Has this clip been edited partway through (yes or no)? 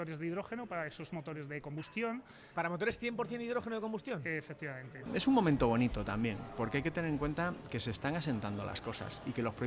yes